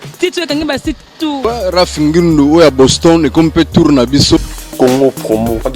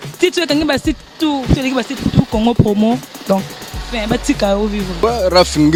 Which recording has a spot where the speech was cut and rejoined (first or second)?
first